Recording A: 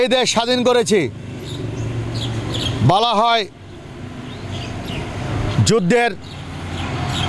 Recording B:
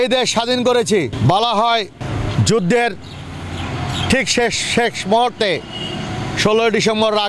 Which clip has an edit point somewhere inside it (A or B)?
B